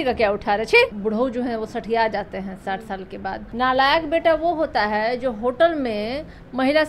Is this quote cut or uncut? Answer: cut